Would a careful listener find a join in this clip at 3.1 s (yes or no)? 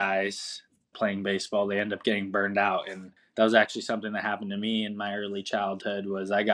no